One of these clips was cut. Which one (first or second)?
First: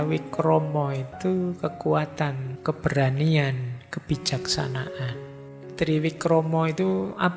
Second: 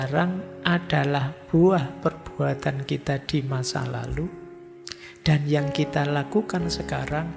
first